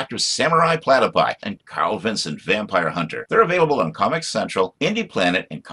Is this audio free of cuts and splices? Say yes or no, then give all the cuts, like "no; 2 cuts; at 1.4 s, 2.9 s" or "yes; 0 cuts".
yes; 0 cuts